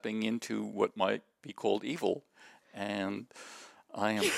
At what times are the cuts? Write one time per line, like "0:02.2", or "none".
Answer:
none

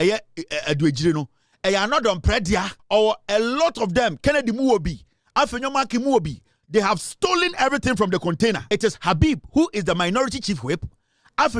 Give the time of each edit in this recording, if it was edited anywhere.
0:02.8
0:08.6

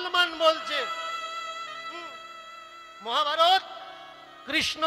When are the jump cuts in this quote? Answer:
none

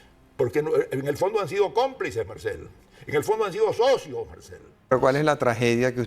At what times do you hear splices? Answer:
0:04.9

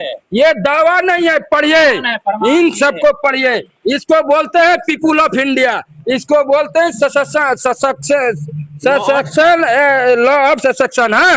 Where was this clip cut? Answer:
none

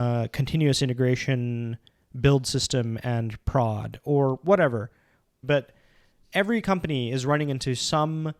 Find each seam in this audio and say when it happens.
0:05.4

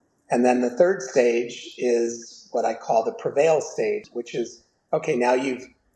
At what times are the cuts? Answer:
0:04.1

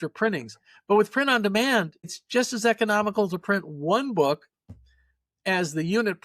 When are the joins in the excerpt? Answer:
0:02.2

